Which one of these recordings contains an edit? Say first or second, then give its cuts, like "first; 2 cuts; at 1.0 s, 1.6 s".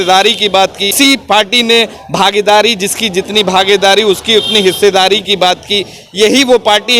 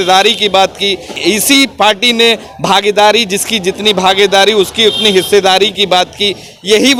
first; 1 cut; at 0.9 s